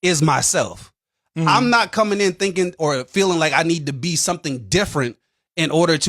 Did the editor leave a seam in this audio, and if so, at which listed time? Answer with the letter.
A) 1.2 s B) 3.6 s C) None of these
A